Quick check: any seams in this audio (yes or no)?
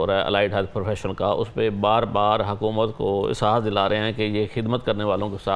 no